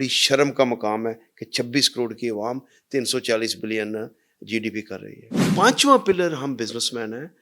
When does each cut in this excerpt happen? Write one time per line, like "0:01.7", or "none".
0:05.4